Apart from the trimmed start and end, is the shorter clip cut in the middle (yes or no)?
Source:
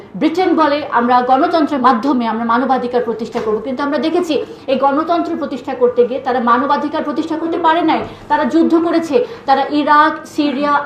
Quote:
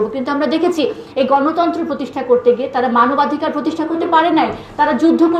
no